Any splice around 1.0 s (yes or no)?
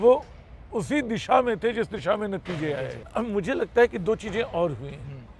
no